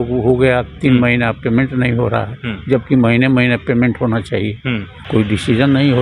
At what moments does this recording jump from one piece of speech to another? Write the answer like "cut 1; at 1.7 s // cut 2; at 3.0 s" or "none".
cut 1; at 4.9 s